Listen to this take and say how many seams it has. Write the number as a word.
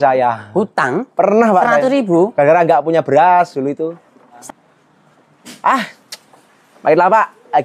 one